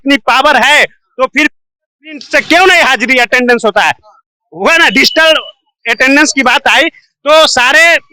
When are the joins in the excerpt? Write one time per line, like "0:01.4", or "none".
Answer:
none